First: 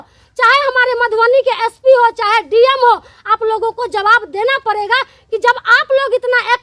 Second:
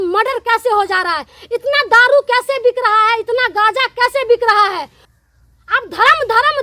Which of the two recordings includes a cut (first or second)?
second